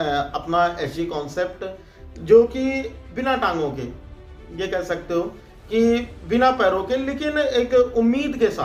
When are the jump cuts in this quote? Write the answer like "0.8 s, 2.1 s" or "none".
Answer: none